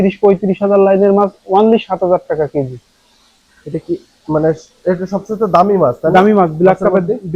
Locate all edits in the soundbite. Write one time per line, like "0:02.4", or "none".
none